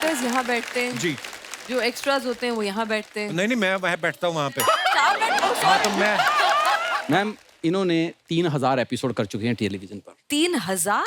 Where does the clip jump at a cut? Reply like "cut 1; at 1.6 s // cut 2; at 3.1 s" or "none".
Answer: cut 1; at 6.9 s